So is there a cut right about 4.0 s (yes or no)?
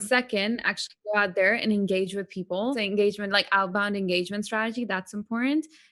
no